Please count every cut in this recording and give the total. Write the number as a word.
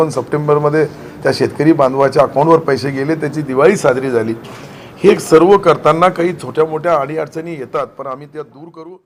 zero